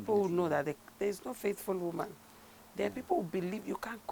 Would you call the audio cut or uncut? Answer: uncut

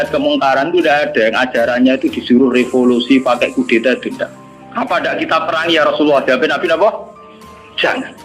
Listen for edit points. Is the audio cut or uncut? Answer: uncut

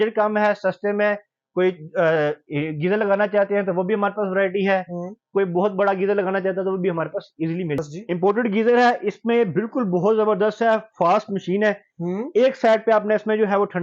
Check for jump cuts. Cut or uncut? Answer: cut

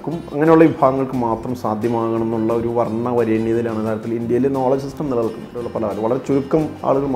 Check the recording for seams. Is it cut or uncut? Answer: cut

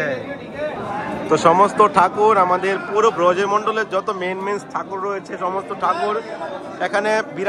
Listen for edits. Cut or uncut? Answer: uncut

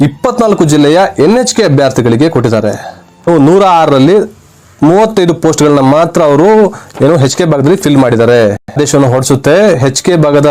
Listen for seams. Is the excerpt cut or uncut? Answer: cut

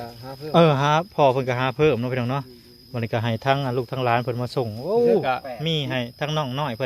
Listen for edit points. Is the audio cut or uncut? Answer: cut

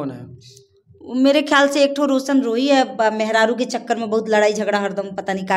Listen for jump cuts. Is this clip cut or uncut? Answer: uncut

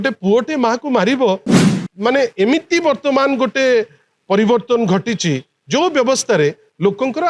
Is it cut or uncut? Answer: cut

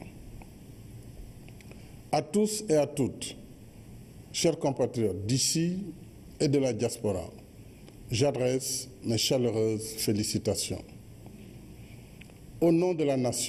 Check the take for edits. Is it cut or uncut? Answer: uncut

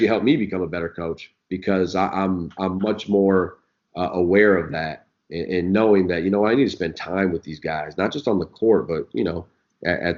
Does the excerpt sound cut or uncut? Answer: uncut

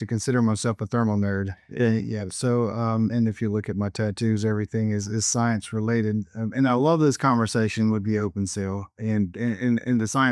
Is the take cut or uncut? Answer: uncut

